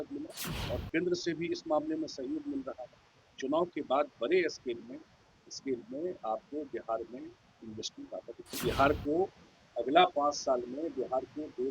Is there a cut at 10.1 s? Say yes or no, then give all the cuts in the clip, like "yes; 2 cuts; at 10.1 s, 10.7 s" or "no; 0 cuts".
no; 1 cut; at 8.6 s